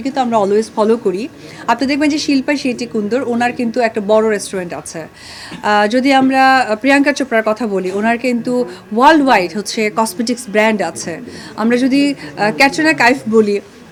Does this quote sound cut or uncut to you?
uncut